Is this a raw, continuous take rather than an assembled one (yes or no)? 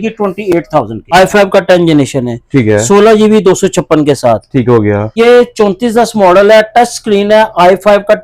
no